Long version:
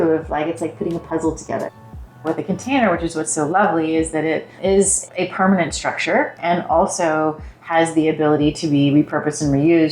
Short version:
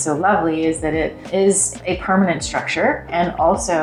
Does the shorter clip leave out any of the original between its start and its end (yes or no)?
no